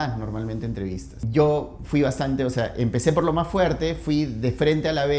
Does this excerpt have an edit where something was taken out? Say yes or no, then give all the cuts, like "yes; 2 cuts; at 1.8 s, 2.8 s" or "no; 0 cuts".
yes; 1 cut; at 1.1 s